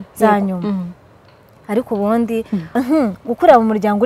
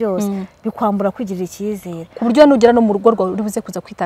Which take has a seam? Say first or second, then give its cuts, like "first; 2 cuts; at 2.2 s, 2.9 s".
first; 1 cut; at 2.7 s